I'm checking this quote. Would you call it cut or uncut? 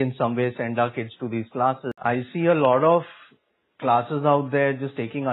cut